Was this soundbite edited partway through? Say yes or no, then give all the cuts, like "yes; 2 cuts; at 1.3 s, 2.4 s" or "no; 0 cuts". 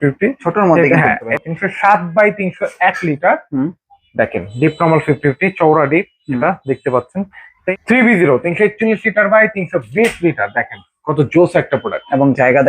yes; 2 cuts; at 1.3 s, 7.7 s